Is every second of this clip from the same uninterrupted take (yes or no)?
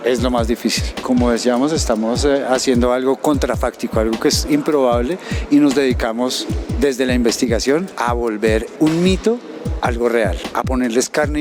yes